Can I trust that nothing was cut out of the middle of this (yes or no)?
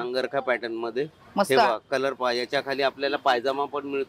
yes